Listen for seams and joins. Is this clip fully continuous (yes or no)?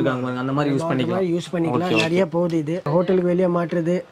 no